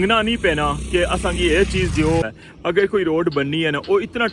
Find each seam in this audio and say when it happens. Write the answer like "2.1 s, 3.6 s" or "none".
2.4 s